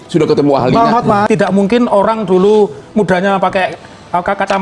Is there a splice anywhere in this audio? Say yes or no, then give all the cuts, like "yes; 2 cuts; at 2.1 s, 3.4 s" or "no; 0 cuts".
yes; 1 cut; at 1.3 s